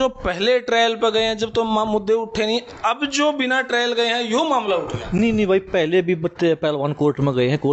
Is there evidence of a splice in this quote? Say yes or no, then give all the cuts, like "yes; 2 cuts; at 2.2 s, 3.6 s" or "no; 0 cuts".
no; 0 cuts